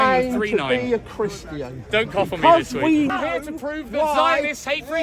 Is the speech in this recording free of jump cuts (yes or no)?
no